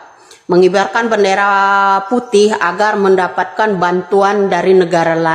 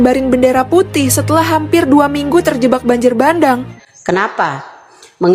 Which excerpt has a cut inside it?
second; 1 cut; at 3.7 s

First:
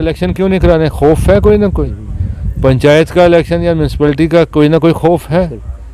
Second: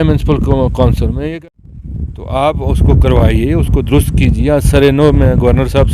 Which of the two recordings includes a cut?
second; 1 cut; at 1.1 s

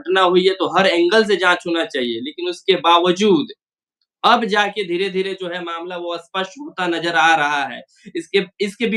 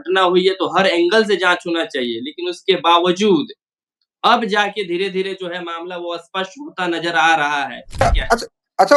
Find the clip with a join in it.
second; 1 cut; at 8.0 s

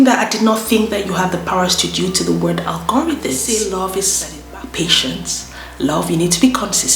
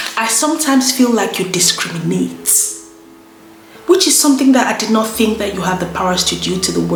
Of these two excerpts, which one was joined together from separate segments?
first; 1 cut; at 3.4 s

